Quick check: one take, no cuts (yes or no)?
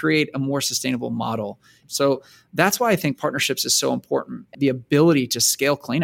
no